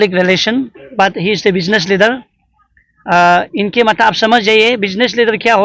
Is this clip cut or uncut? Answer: uncut